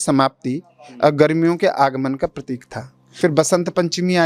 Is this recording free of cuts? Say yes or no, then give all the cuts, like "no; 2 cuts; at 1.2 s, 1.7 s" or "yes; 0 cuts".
no; 1 cut; at 3.0 s